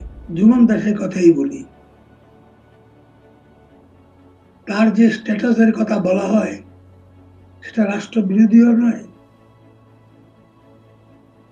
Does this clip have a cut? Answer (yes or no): no